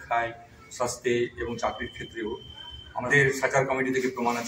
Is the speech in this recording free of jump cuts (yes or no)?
no